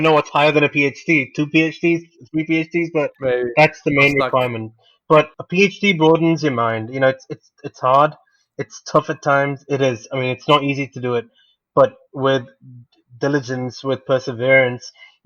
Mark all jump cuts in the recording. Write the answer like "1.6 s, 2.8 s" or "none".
none